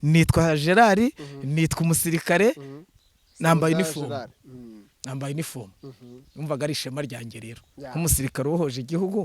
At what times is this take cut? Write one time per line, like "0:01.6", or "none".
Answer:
none

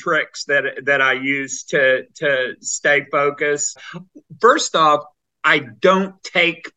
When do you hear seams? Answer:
0:03.7

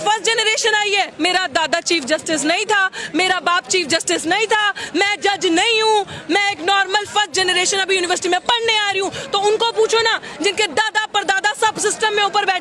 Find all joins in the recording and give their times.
0:01.1

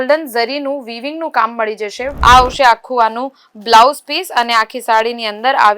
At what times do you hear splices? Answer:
0:02.1

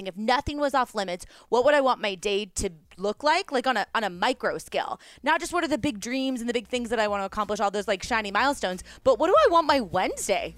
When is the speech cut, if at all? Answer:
none

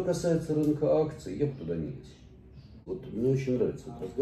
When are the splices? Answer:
0:02.8

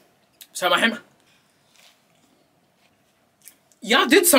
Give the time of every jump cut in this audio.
0:01.3
0:02.9

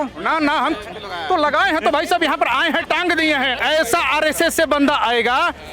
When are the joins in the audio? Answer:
0:03.6

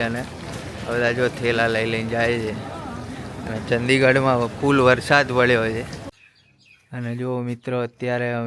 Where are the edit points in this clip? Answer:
0:06.1

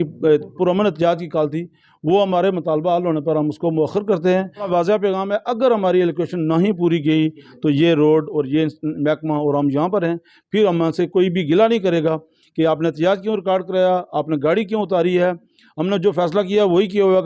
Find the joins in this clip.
0:04.7

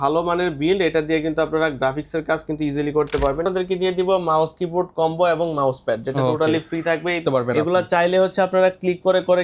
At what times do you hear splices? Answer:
0:03.4
0:07.2

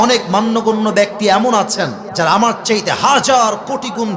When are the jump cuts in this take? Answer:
0:02.0

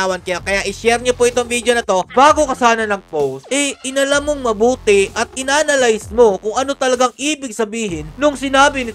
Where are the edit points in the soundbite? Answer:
0:02.1
0:03.4

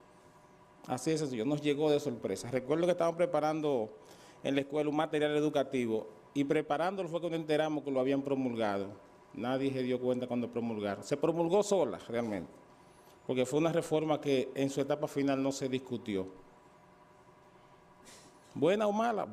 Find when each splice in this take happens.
0:17.5

